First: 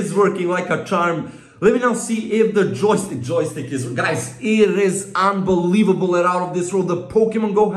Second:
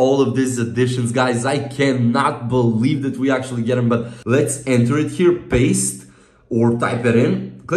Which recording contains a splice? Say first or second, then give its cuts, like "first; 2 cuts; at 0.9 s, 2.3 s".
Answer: second; 1 cut; at 4.1 s